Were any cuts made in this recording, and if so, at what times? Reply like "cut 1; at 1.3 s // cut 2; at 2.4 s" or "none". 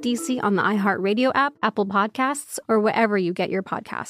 cut 1; at 1.5 s